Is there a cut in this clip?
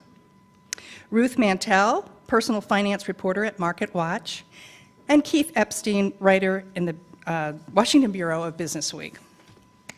no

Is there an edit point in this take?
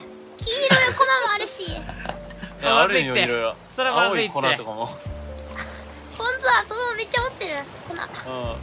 no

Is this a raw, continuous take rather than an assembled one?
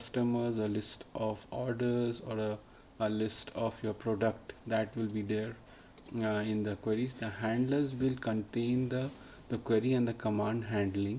yes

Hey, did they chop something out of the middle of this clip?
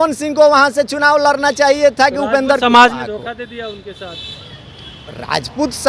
no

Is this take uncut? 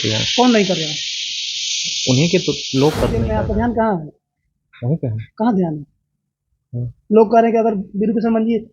no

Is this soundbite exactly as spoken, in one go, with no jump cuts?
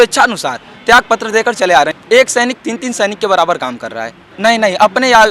no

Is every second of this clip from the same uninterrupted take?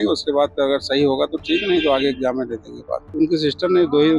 no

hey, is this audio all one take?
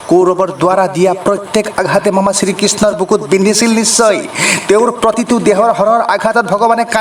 yes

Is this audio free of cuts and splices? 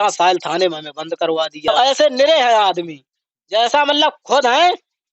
no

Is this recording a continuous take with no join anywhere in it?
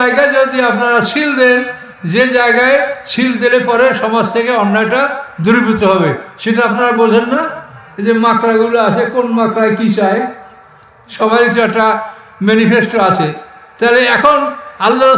yes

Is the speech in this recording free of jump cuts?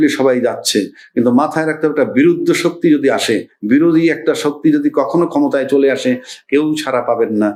yes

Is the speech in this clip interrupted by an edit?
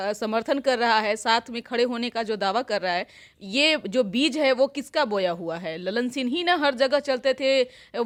no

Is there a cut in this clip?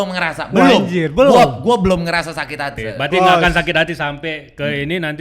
yes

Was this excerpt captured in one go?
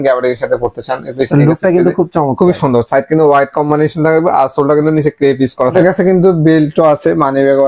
no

